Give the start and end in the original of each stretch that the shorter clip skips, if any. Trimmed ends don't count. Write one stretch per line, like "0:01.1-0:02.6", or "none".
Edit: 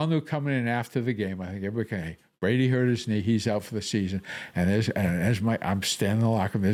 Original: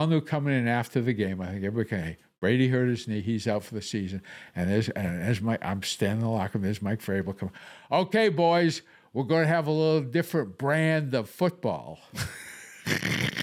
none